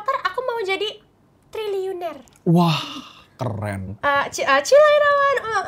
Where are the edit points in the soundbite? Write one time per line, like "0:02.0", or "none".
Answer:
0:03.9